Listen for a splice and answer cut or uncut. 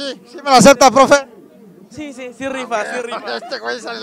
uncut